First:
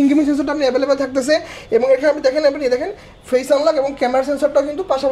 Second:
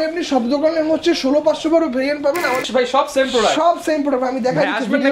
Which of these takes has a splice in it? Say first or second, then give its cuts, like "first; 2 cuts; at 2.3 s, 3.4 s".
second; 1 cut; at 2.6 s